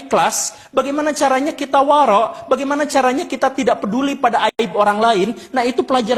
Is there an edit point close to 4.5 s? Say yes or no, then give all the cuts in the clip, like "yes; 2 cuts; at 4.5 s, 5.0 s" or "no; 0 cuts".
no; 0 cuts